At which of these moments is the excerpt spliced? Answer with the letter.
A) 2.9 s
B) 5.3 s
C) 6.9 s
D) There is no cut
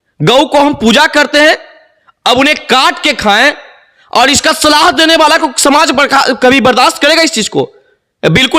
D